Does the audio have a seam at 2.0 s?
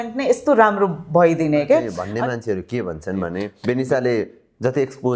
yes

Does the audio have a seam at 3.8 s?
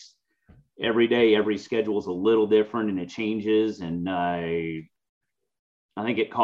no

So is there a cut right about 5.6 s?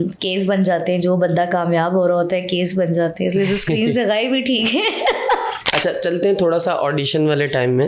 yes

